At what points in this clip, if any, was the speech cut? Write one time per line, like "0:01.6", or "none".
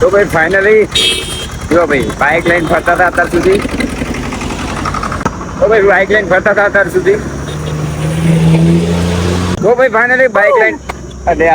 0:05.2
0:09.5